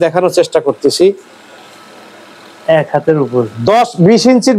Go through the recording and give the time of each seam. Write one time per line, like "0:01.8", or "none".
none